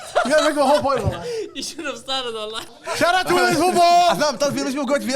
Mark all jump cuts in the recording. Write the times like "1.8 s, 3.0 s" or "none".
2.7 s, 4.2 s